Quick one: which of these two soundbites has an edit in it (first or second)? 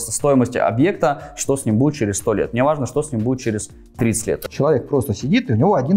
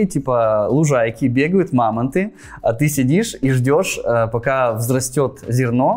first